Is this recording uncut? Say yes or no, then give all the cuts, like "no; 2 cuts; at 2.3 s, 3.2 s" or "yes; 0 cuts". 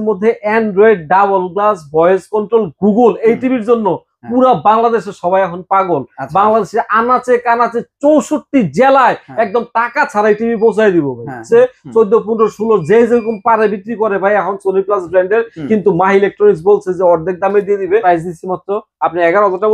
no; 2 cuts; at 11.4 s, 18.0 s